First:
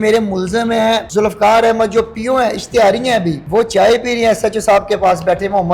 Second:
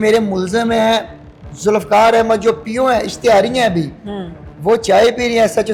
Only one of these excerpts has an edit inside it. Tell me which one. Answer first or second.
first